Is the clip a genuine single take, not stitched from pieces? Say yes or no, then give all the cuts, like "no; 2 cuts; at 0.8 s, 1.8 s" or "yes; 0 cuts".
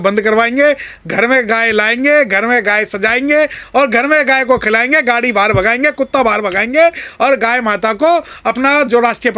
yes; 0 cuts